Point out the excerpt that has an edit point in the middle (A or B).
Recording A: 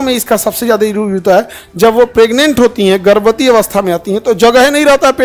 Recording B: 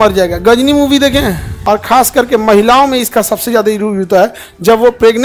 B